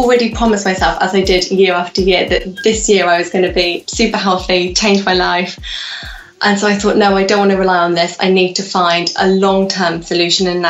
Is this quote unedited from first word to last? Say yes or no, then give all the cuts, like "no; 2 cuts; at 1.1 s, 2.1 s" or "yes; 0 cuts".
yes; 0 cuts